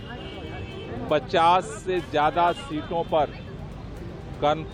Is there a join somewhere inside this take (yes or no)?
no